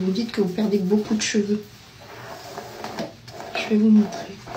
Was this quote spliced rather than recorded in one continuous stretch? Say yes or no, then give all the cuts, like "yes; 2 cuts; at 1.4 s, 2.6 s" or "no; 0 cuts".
no; 0 cuts